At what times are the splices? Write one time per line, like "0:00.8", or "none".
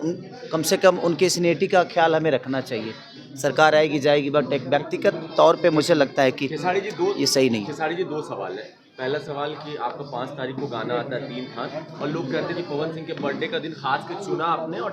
none